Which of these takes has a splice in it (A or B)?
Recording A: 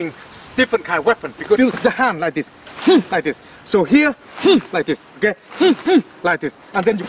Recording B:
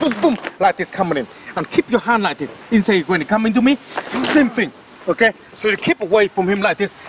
A